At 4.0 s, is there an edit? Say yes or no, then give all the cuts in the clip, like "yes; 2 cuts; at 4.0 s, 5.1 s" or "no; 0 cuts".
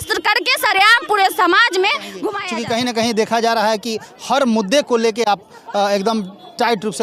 no; 1 cut; at 2.3 s